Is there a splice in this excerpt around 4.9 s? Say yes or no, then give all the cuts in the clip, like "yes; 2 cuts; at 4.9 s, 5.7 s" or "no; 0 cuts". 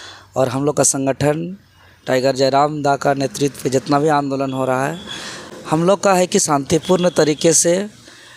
no; 0 cuts